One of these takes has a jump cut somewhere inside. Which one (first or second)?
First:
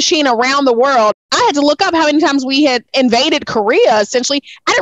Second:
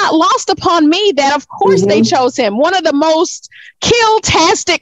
first